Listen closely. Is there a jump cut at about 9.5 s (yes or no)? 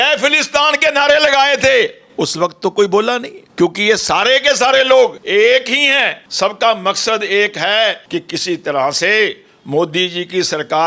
no